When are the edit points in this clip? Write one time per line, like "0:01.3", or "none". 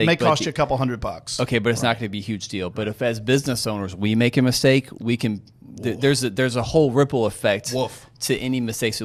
none